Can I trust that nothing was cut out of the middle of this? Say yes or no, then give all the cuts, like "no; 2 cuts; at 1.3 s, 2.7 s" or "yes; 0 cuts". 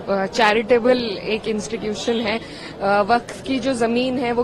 yes; 0 cuts